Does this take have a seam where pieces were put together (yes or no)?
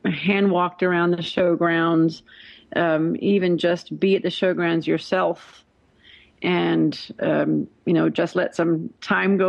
no